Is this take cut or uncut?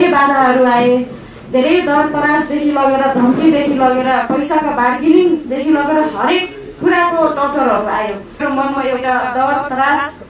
cut